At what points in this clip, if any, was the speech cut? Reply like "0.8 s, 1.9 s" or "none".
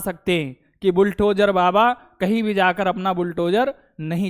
none